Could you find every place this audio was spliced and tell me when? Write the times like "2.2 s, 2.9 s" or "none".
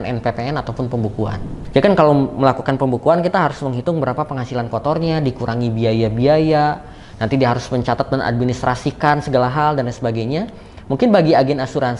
1.5 s